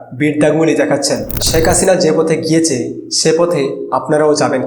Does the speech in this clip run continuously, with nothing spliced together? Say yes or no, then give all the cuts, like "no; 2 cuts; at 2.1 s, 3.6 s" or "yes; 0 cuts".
no; 1 cut; at 1.3 s